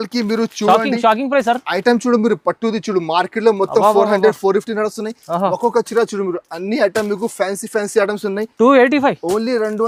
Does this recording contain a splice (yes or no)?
no